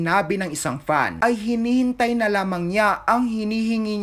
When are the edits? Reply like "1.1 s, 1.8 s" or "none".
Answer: 1.1 s